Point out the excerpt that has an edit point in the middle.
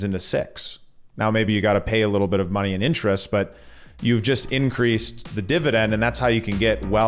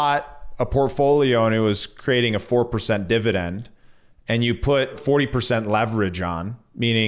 second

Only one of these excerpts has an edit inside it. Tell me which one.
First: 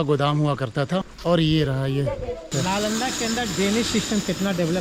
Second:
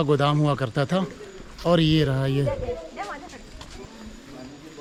first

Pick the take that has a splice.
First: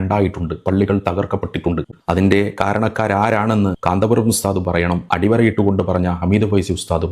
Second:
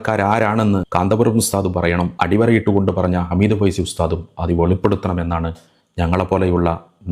first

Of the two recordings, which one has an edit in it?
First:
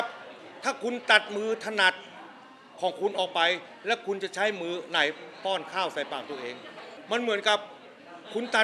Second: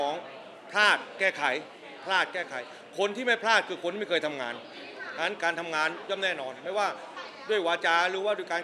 first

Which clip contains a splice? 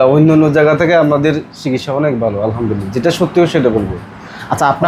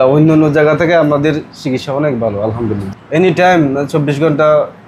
second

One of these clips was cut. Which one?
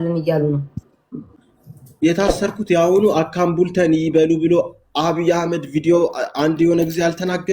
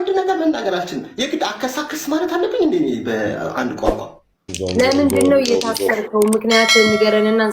second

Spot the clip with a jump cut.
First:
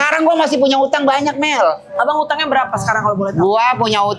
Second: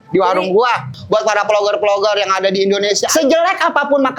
second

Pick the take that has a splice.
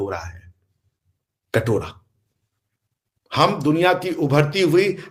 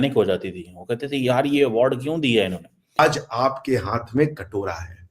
second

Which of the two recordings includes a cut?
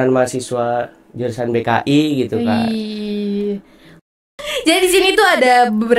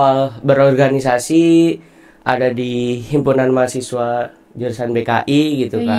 first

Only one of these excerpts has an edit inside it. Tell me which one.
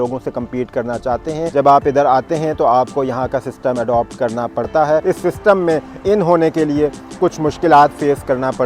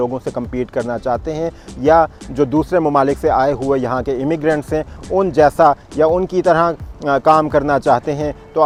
first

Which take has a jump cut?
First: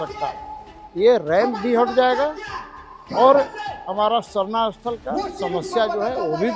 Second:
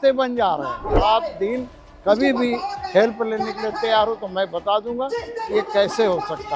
second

